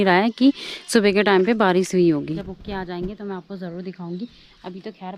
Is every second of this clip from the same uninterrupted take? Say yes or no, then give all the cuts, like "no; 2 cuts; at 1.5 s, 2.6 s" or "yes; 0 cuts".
no; 1 cut; at 2.3 s